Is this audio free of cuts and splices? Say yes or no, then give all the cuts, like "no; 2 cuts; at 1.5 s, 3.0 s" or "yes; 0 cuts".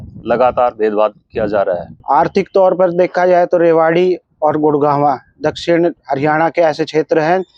no; 1 cut; at 1.9 s